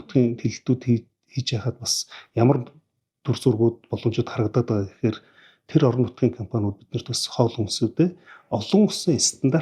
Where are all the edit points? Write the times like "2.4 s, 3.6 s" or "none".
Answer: none